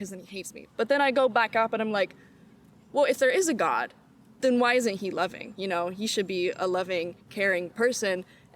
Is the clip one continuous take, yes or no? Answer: yes